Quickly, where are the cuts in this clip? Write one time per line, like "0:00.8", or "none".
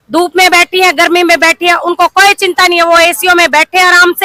none